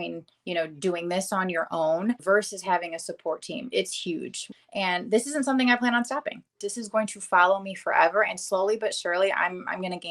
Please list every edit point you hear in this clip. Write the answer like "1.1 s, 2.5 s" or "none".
2.2 s, 4.4 s, 6.6 s